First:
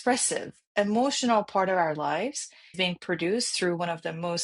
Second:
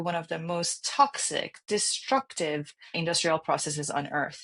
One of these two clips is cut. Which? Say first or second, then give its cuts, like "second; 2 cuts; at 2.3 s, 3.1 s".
first; 1 cut; at 2.8 s